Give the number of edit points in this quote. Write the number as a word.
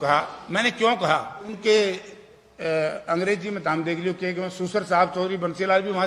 one